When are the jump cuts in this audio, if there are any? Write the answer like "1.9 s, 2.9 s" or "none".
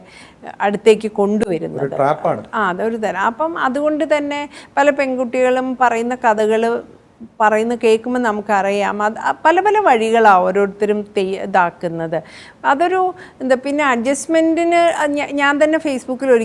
none